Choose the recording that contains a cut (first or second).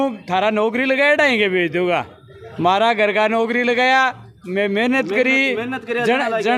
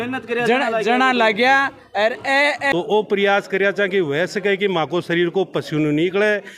second